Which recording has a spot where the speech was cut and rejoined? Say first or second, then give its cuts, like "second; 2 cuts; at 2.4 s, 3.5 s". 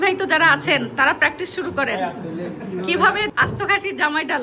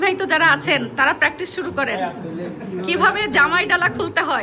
first; 1 cut; at 3.3 s